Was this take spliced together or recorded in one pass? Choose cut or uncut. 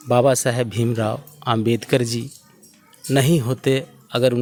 uncut